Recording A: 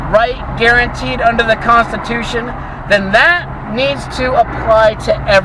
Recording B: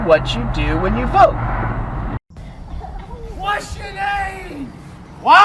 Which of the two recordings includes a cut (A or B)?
B